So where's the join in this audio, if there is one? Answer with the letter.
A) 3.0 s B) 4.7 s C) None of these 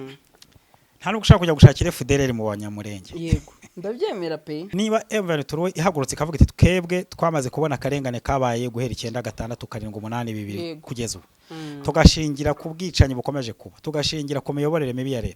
B